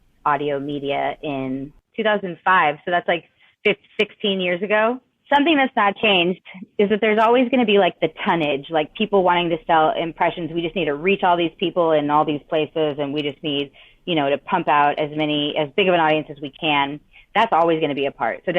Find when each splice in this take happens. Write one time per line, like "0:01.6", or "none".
0:01.8
0:05.1

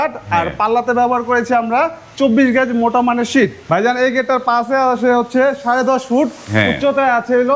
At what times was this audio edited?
0:03.6

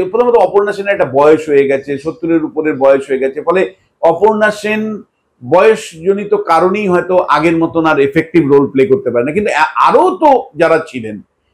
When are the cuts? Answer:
none

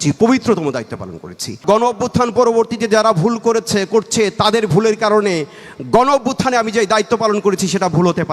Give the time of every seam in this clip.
0:01.6

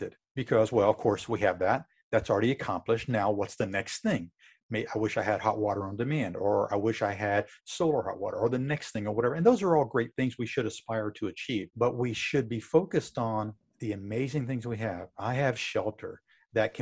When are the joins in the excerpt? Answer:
0:11.7

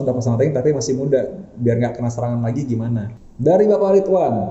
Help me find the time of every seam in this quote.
0:03.2

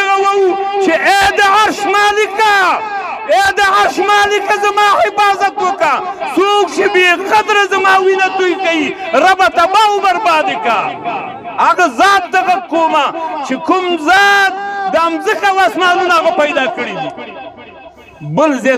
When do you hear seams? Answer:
none

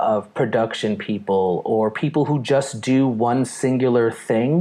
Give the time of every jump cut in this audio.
none

